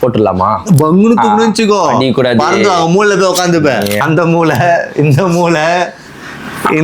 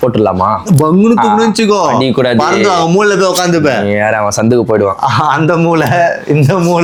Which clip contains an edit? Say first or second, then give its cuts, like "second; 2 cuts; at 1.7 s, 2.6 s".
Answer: first; 1 cut; at 4.0 s